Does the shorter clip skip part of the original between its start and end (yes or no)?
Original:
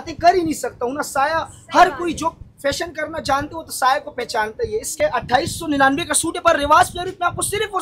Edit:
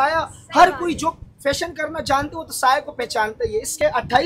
no